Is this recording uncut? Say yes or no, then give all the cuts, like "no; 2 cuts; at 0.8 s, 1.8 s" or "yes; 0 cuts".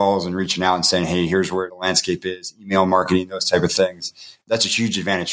no; 1 cut; at 4.4 s